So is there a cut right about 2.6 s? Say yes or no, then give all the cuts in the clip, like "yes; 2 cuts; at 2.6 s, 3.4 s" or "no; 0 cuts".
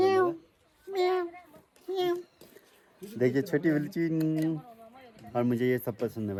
no; 0 cuts